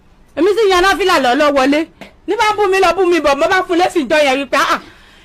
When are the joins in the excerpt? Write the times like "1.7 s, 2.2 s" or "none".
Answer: 2.2 s